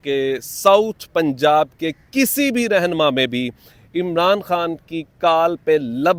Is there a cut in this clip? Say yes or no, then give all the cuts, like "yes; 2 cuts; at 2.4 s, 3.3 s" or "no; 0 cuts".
no; 0 cuts